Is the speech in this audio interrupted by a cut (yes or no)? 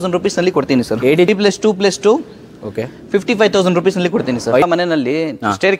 yes